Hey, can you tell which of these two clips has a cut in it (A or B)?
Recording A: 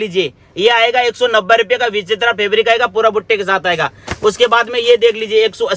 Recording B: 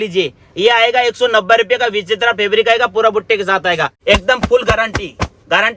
B